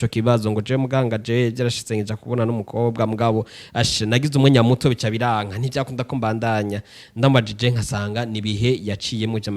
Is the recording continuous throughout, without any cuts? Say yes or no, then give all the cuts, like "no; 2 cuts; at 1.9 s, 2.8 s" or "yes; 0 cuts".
yes; 0 cuts